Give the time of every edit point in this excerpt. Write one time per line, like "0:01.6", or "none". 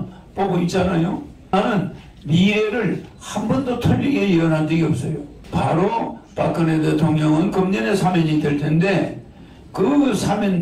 0:01.5